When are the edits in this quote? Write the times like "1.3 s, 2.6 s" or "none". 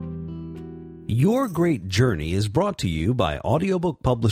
1.0 s